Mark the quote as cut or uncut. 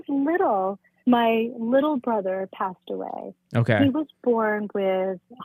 uncut